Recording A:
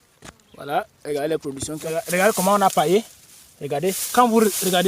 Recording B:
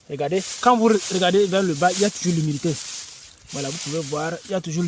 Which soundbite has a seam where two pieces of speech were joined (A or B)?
A